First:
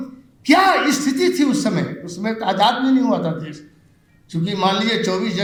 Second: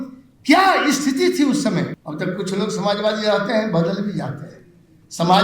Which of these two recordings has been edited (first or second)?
second